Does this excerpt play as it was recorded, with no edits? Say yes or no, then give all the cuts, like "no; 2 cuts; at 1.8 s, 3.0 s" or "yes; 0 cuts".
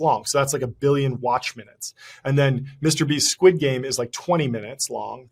yes; 0 cuts